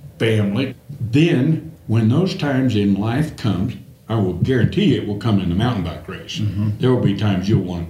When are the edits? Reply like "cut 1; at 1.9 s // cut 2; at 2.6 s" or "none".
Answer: cut 1; at 4.0 s